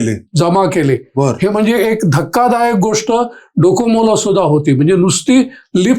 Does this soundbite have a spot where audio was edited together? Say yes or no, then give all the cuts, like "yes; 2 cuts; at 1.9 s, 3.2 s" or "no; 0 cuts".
no; 0 cuts